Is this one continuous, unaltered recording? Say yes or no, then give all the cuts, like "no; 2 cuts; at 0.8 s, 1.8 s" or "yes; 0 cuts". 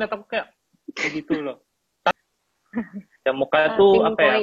no; 1 cut; at 2.1 s